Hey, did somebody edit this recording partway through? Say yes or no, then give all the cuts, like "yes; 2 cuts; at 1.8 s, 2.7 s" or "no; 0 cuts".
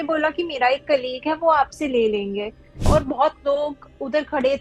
yes; 1 cut; at 2.9 s